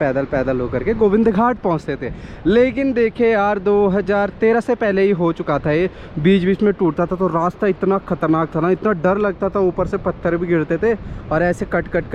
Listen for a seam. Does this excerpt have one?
no; 0 cuts

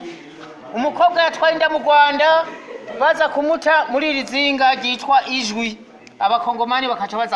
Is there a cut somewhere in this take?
no; 0 cuts

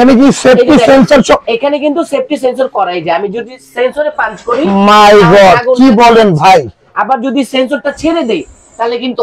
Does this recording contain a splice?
no; 0 cuts

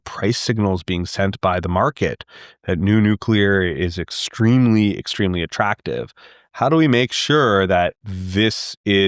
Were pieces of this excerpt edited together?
no; 0 cuts

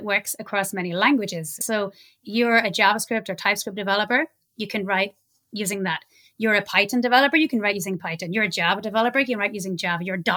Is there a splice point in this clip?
yes; 1 cut; at 1.6 s

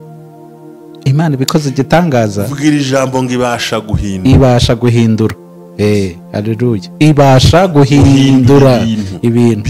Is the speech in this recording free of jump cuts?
yes; 0 cuts

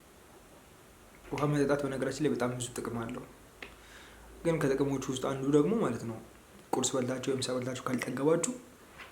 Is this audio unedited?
no; 1 cut; at 1.2 s

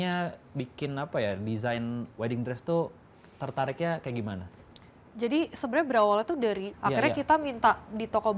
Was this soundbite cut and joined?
yes; 1 cut; at 6.7 s

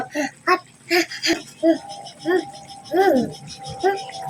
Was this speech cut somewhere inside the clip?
yes; 1 cut; at 1.5 s

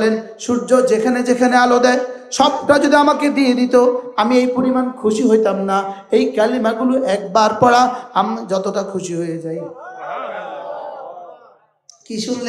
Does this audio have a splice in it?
no; 0 cuts

